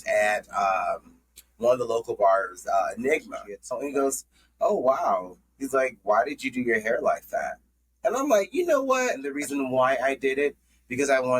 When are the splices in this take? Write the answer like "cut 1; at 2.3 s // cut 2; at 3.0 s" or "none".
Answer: cut 1; at 3.7 s // cut 2; at 9.4 s